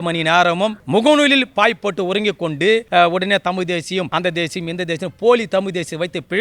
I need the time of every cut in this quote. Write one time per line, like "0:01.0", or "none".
0:00.8
0:02.9
0:04.1